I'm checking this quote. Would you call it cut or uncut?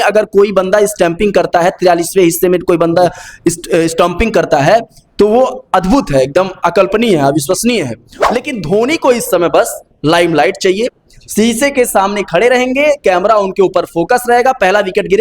cut